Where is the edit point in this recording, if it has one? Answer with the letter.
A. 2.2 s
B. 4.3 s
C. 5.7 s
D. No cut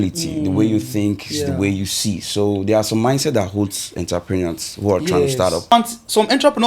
C